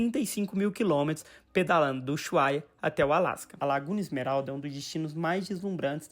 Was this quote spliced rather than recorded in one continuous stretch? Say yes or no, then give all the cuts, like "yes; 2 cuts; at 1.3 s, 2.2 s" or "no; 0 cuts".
yes; 1 cut; at 3.5 s